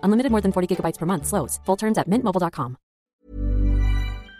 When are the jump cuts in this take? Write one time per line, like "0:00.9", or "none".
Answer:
0:03.0